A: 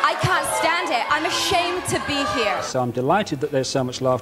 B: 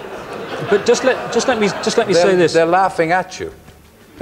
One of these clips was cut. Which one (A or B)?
A